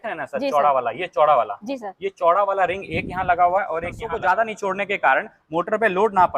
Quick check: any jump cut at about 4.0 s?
yes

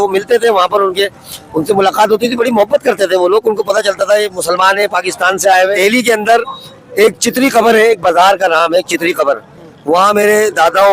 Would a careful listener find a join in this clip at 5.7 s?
yes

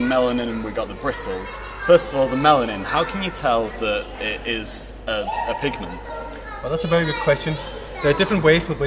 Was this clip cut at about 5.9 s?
yes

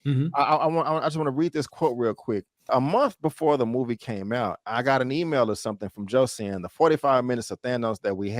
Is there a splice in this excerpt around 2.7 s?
yes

